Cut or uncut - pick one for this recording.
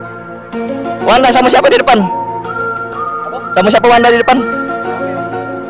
cut